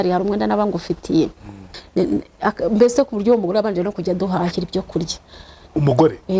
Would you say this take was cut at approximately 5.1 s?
no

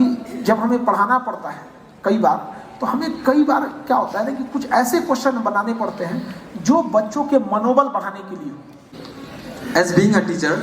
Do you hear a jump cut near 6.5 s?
no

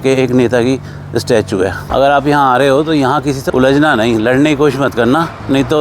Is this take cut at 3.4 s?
yes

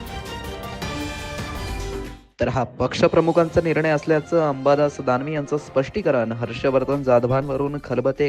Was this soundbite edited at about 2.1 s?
yes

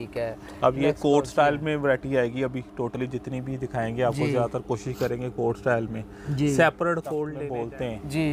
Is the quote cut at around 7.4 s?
yes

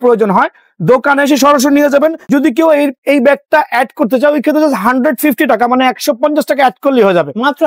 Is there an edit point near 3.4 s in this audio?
no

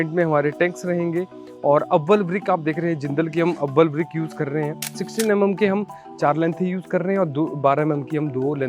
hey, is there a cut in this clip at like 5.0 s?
yes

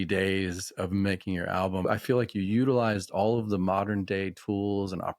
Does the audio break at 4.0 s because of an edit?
no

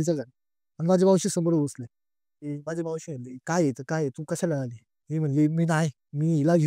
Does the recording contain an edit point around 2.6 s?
yes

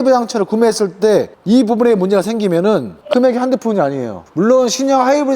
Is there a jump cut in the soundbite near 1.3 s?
no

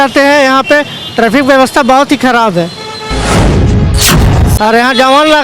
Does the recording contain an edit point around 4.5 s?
yes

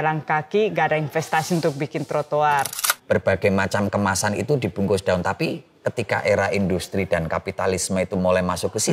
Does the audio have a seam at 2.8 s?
yes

